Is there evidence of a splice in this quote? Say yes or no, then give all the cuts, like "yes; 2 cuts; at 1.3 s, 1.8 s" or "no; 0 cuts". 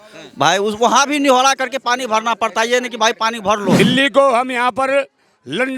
yes; 1 cut; at 3.8 s